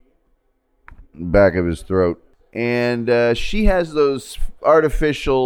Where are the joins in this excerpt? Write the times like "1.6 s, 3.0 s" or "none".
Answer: 2.3 s